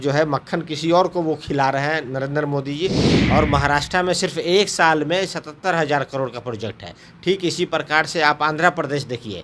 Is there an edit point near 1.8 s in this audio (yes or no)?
no